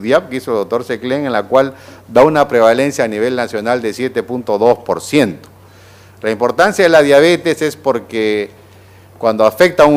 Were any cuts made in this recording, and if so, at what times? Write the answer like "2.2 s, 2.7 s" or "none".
none